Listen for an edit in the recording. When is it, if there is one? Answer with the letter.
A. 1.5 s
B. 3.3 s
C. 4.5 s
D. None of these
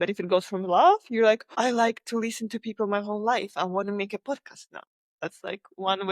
A